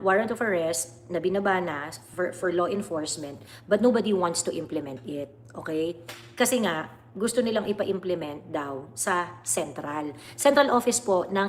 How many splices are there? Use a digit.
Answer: 0